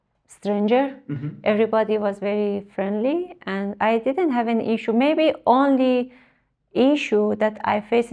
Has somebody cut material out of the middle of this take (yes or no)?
no